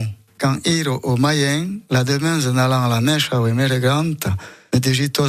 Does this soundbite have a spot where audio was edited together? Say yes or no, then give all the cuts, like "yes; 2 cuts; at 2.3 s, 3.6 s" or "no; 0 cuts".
no; 0 cuts